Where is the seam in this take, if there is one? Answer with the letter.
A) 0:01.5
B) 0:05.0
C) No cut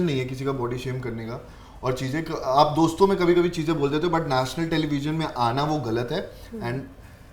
C